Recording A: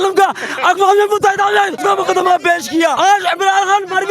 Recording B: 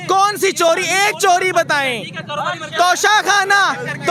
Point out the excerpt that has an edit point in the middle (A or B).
A